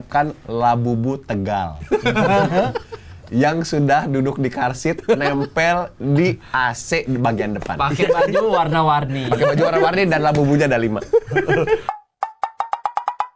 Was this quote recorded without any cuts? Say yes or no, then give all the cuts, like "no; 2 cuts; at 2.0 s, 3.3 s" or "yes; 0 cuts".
yes; 0 cuts